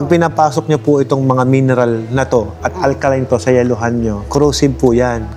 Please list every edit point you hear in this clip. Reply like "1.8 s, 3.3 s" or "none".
none

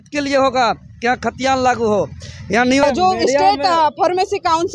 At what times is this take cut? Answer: 2.8 s

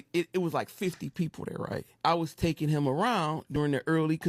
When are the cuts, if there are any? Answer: 2.2 s

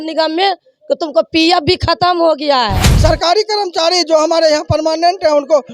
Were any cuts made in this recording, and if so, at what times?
2.8 s

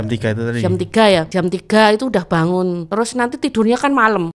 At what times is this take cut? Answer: 1.3 s, 2.8 s

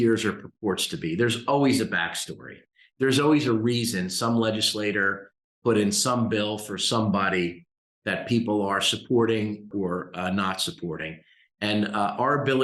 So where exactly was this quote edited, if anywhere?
9.7 s

